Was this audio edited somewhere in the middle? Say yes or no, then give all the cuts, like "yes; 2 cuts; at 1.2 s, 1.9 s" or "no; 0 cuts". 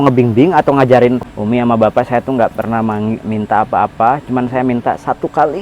yes; 1 cut; at 1.3 s